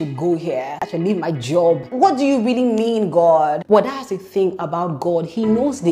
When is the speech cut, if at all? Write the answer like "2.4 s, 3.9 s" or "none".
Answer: 0.8 s, 1.9 s